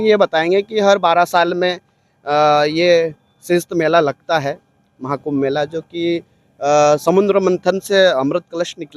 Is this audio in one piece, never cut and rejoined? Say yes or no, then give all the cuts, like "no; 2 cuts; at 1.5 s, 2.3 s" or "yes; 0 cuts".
yes; 0 cuts